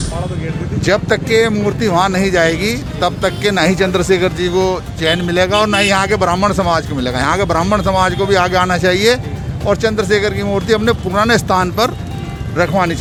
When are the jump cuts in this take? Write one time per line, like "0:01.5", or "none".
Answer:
none